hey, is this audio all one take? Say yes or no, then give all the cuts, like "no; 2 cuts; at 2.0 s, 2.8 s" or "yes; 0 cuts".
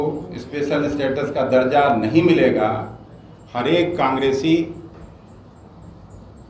yes; 0 cuts